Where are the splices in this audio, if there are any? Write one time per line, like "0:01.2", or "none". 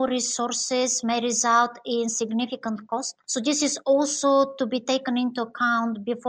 0:03.2